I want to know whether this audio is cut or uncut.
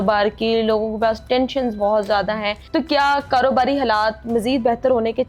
cut